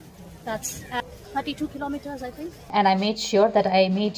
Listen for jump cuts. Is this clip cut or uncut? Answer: cut